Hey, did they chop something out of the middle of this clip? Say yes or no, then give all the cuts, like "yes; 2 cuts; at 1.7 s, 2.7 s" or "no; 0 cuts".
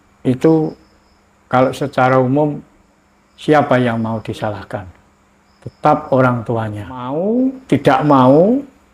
yes; 1 cut; at 7.1 s